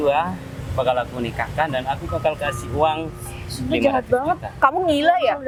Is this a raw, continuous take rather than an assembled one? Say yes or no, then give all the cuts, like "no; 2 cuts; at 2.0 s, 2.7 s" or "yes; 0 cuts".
yes; 0 cuts